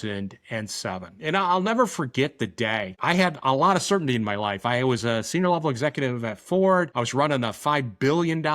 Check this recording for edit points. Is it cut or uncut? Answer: cut